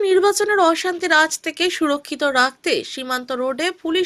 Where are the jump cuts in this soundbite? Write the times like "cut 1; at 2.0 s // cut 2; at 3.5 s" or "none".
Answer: none